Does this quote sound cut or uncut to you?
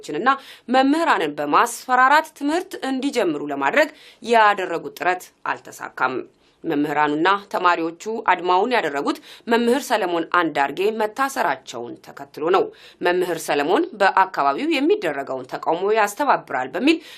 cut